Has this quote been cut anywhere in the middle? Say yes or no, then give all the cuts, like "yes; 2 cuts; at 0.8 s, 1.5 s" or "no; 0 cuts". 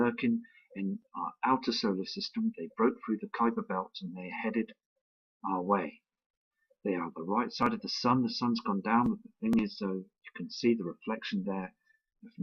yes; 1 cut; at 3.7 s